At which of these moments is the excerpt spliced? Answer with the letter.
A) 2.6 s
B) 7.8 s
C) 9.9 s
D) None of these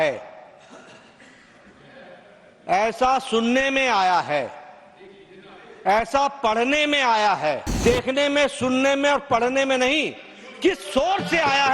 B